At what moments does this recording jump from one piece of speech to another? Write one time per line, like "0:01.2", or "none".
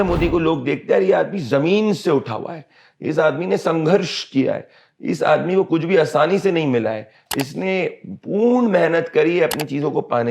none

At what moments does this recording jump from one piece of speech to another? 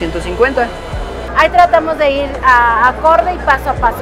0:01.2

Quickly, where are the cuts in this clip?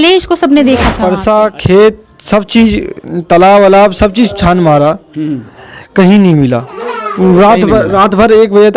0:01.0

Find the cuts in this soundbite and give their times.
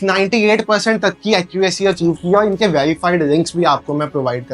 none

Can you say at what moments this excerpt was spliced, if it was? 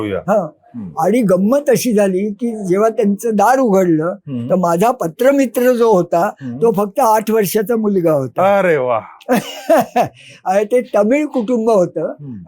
none

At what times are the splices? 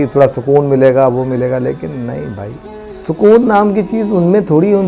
0:03.0

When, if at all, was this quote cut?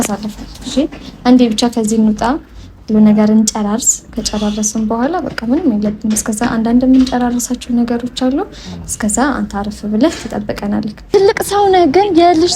0:11.0

